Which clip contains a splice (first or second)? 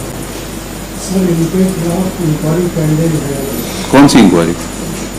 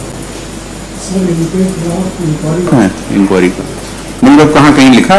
second